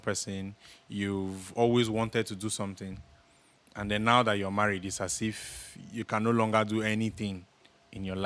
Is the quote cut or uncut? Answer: uncut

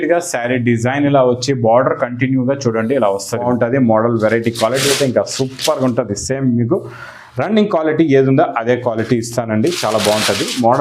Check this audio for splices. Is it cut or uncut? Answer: cut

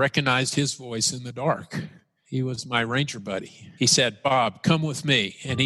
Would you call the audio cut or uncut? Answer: cut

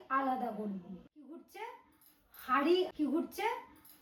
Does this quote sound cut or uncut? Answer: uncut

